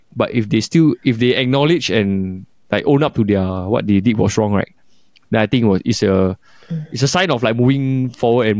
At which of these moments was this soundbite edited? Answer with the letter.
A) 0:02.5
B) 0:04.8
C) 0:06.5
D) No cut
D